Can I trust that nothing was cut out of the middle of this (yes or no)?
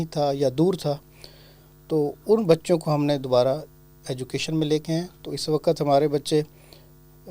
yes